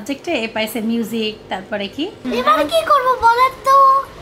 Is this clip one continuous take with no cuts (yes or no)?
no